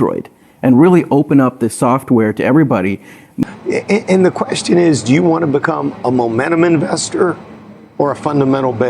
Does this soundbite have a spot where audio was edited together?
yes; 1 cut; at 3.4 s

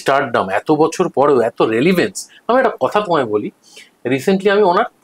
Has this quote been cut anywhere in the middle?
no; 0 cuts

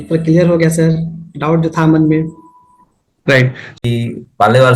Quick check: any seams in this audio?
yes; 1 cut; at 3.7 s

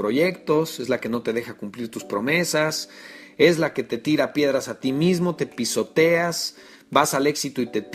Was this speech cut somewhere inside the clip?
no; 0 cuts

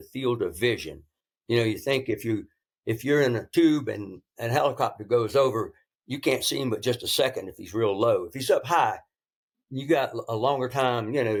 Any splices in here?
no; 0 cuts

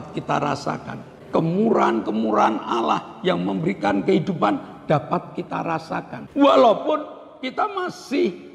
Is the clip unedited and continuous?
no; 2 cuts; at 1.2 s, 6.2 s

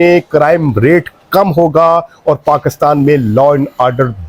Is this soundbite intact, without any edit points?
yes; 0 cuts

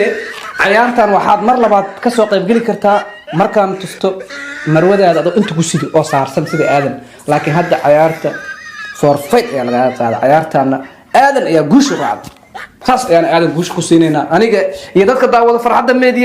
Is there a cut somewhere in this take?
no; 0 cuts

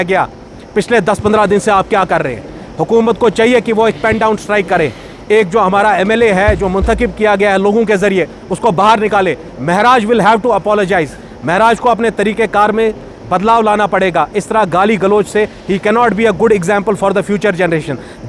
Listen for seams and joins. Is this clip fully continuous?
yes; 0 cuts

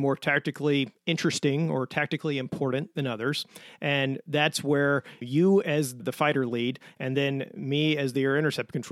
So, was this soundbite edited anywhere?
yes; 2 cuts; at 5.2 s, 6.0 s

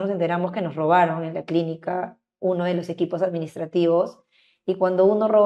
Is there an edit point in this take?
no; 0 cuts

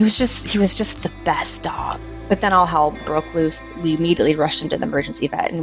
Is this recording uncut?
no; 2 cuts; at 2.1 s, 3.6 s

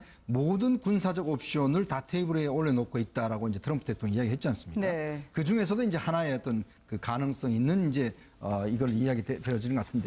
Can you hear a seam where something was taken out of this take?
no; 0 cuts

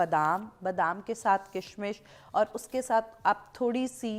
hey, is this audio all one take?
yes; 0 cuts

